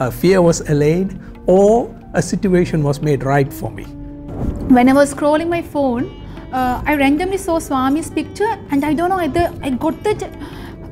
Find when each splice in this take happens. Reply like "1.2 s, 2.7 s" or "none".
4.2 s